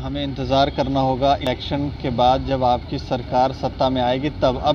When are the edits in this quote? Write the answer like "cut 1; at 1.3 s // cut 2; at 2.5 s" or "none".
cut 1; at 1.4 s